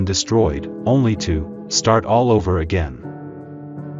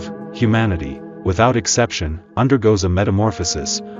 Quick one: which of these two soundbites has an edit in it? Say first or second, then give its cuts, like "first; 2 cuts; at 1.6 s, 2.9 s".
first; 1 cut; at 2.9 s